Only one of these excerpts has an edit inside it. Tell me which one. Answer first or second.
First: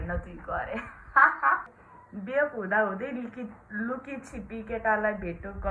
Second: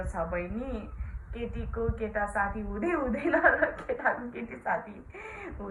first